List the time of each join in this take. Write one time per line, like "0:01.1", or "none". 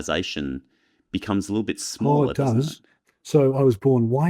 0:03.0